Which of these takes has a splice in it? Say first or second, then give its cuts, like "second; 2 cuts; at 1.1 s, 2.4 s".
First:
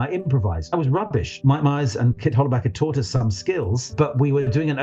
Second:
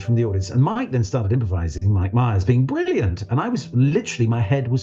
first; 2 cuts; at 0.7 s, 3.9 s